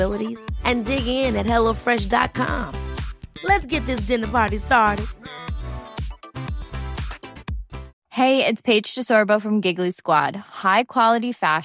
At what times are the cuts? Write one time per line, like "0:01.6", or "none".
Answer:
0:07.9